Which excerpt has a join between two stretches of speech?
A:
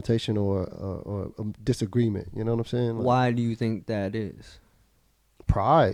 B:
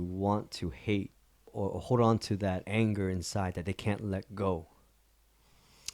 B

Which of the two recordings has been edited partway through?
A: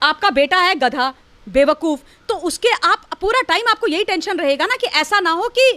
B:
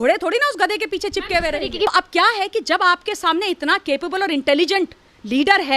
B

